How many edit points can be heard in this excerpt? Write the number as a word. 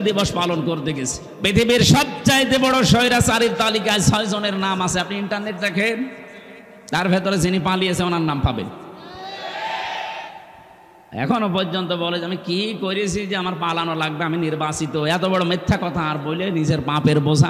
one